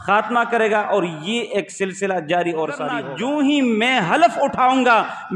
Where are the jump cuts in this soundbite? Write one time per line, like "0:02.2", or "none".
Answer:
0:03.1